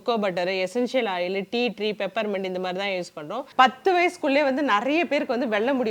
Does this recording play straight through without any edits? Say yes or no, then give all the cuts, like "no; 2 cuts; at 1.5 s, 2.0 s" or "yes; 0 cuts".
no; 1 cut; at 3.4 s